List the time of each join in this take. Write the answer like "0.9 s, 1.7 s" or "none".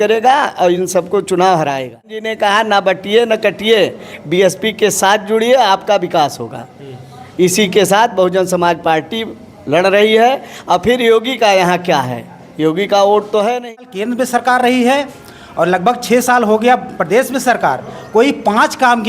2.3 s, 14.0 s